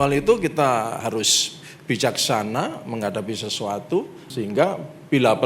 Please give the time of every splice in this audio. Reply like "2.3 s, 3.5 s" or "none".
1.0 s, 4.2 s